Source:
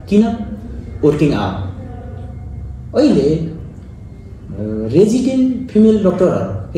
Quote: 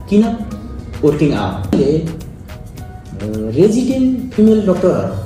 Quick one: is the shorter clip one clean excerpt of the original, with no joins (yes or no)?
no